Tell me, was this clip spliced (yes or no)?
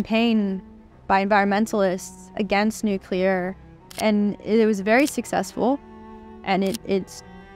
yes